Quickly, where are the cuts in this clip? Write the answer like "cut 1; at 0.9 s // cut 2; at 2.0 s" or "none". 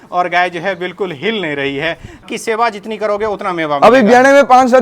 cut 1; at 2.2 s